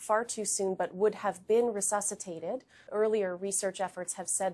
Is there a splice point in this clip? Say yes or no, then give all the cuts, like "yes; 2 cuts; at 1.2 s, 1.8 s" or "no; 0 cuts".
yes; 1 cut; at 2.7 s